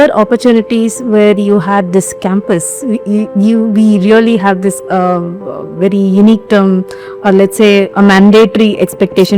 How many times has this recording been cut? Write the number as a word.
zero